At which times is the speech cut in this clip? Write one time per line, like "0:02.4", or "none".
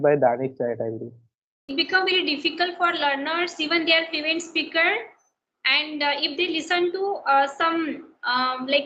0:01.6